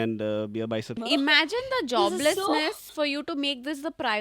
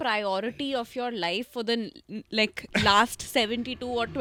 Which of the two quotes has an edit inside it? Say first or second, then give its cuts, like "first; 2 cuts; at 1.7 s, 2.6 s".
first; 2 cuts; at 1.0 s, 2.9 s